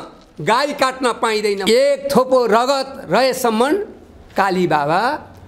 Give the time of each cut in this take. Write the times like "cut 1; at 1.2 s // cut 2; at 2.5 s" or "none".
cut 1; at 1.6 s